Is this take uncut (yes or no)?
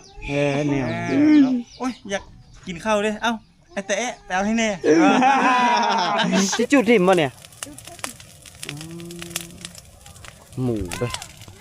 no